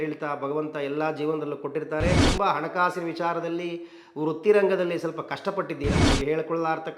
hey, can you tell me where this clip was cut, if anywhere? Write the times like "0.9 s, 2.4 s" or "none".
2.2 s, 6.0 s